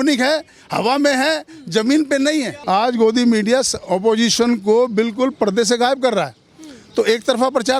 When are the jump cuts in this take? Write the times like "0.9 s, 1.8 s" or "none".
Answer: 2.6 s